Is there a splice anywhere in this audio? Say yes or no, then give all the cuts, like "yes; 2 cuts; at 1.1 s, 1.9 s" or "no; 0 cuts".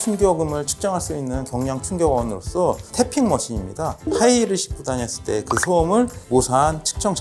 no; 0 cuts